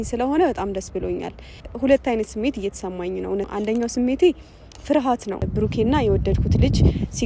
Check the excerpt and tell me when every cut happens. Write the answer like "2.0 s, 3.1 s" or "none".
1.6 s, 3.5 s, 5.5 s

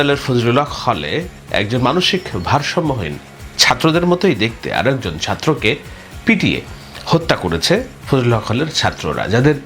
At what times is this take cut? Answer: none

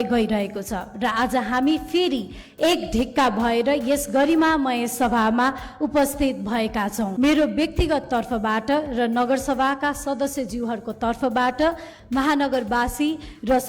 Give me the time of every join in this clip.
7.1 s

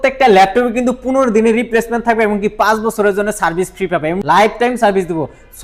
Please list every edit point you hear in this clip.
4.2 s

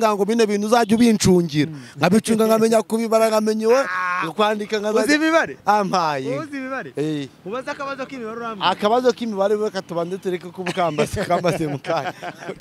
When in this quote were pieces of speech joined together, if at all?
none

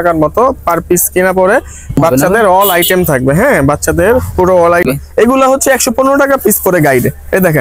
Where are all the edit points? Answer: 2.0 s, 4.9 s

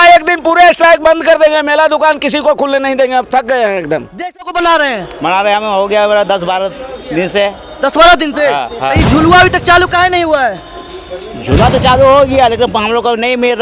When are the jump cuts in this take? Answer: 4.5 s

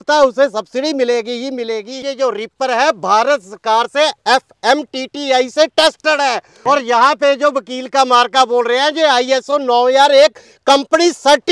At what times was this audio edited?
2.0 s, 6.5 s

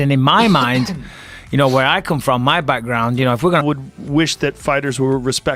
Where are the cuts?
none

